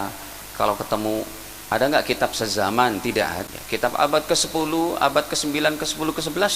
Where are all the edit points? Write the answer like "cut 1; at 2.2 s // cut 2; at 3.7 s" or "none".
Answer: cut 1; at 3.5 s